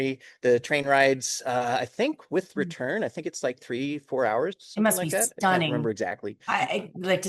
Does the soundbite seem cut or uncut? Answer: uncut